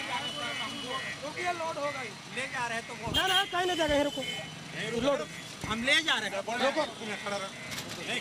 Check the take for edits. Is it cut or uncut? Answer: uncut